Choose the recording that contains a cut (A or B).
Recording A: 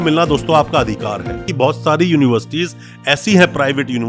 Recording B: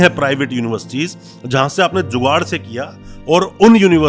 A